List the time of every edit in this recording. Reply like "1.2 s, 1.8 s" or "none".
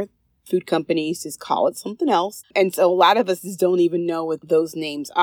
2.4 s